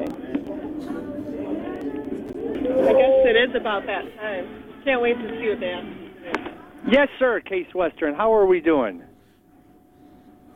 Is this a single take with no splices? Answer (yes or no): no